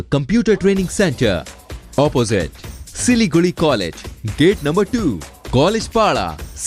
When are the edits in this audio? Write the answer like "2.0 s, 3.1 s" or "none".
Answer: none